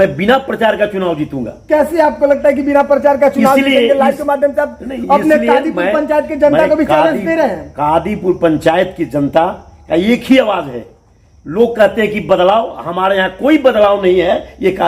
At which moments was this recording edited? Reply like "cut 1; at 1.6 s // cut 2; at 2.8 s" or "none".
none